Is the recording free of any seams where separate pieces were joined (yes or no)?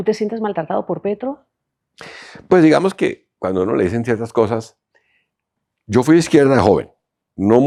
yes